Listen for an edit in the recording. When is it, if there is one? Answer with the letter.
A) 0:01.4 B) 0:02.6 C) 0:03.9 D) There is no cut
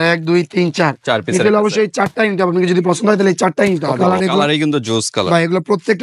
C